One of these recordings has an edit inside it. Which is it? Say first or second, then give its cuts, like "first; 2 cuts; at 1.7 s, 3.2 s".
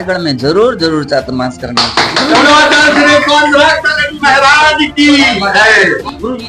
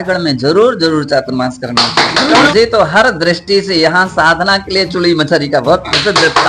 second; 1 cut; at 2.5 s